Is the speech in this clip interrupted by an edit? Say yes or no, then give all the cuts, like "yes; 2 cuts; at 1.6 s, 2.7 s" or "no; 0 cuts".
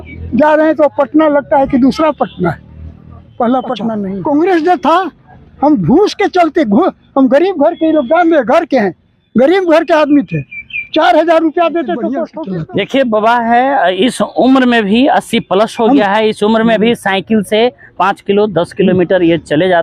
yes; 2 cuts; at 4.1 s, 12.3 s